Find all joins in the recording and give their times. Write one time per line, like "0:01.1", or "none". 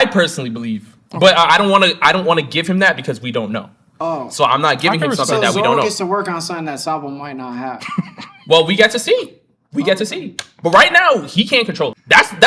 none